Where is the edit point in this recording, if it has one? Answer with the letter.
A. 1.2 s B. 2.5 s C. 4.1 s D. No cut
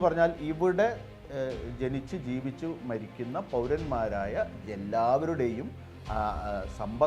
D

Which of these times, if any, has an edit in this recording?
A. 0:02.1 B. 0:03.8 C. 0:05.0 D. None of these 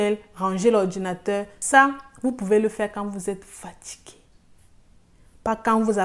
D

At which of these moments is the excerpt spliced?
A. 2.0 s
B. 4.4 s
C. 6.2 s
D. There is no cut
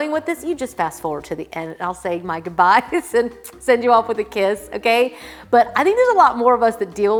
D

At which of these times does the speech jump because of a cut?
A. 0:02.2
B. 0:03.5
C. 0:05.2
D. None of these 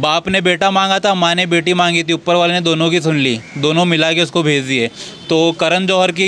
D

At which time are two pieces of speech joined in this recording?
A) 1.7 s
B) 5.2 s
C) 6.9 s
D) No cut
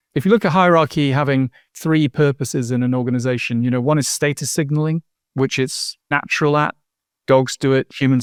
D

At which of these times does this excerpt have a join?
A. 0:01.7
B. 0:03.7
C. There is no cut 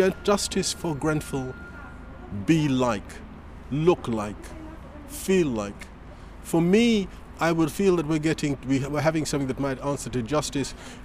C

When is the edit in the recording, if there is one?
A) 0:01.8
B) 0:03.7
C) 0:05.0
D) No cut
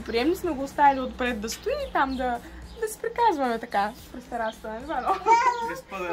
D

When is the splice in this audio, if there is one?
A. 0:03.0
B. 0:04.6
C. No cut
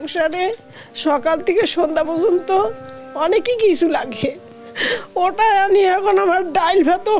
C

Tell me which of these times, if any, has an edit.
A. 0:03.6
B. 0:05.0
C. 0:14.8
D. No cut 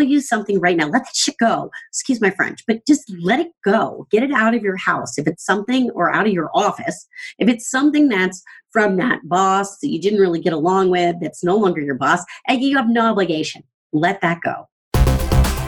C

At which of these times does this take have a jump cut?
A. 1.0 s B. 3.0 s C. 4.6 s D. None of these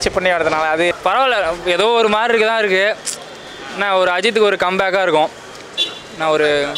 A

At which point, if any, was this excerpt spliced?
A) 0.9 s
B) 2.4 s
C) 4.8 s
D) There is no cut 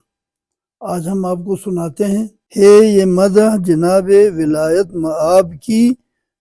B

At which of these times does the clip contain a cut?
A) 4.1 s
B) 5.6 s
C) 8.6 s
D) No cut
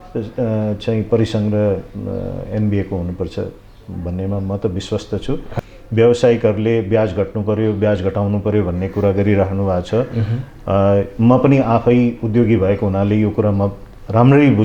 B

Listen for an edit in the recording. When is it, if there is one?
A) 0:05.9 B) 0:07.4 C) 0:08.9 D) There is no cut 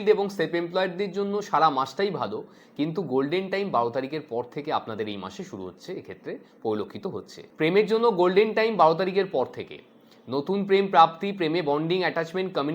B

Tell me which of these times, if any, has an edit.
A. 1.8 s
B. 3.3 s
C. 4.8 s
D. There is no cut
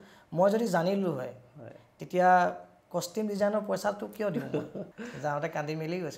C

